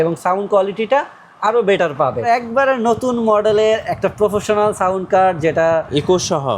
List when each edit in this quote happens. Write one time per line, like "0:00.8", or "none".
0:02.3